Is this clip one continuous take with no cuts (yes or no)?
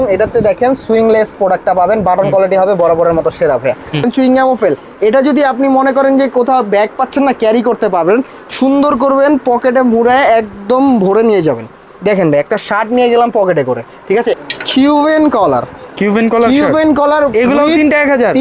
no